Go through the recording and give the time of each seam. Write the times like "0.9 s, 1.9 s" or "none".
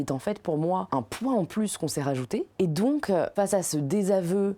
0.9 s, 2.5 s, 3.3 s